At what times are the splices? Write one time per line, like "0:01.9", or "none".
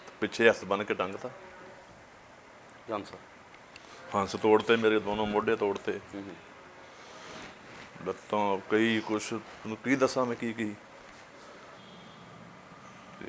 0:11.8